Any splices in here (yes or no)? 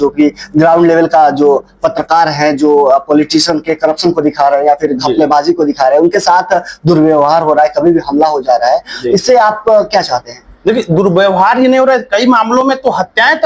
no